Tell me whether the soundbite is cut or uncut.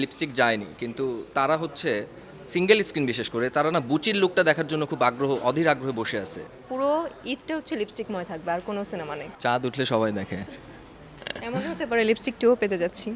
cut